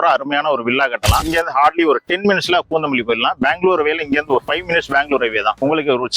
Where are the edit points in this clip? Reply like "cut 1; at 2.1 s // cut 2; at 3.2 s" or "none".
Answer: cut 1; at 1.2 s